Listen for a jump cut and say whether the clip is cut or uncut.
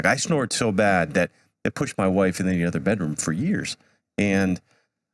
uncut